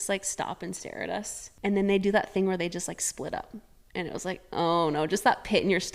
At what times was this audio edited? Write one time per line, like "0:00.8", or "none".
0:01.4

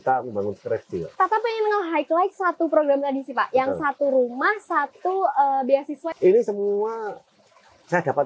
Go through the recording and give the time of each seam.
0:01.1
0:06.0

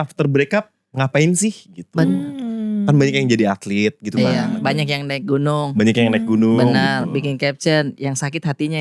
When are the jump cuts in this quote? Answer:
none

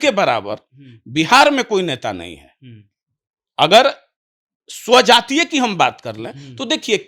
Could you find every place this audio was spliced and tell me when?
none

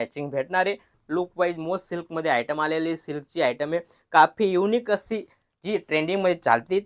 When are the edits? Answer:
0:01.0

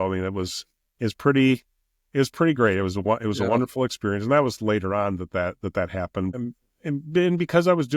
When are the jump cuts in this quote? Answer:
0:06.3

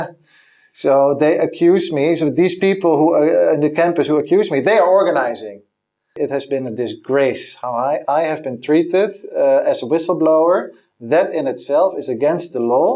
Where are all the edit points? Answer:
0:06.1

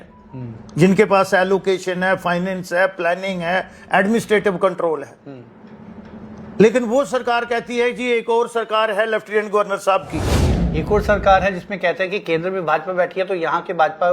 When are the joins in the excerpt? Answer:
0:10.4

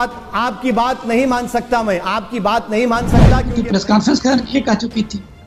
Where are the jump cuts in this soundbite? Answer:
0:03.4

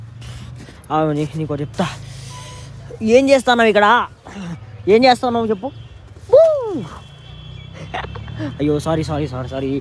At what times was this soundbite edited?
none

